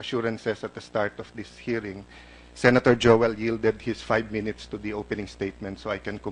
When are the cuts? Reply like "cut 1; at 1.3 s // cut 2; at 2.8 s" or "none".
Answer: cut 1; at 0.9 s